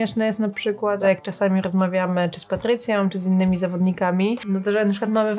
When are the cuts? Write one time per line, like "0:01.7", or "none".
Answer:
0:01.0
0:04.4